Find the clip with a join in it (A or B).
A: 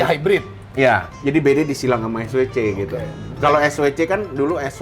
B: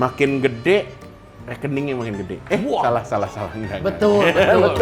A